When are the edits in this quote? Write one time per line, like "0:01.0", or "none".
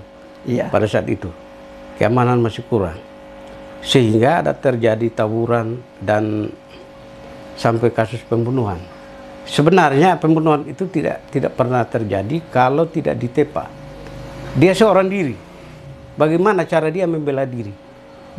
none